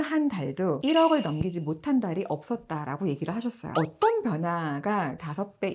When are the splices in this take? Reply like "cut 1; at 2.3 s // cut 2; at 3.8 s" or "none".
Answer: cut 1; at 3.6 s